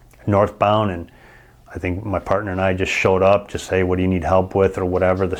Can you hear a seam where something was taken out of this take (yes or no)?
no